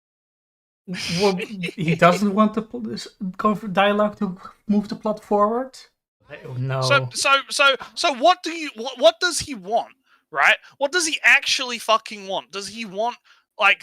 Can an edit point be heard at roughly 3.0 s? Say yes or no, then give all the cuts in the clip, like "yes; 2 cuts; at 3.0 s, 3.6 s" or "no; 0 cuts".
no; 1 cut; at 6.5 s